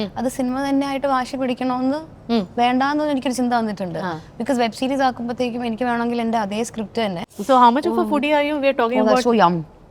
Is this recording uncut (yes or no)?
no